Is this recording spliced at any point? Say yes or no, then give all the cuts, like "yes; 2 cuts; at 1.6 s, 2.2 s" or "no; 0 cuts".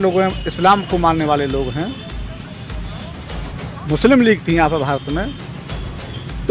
no; 0 cuts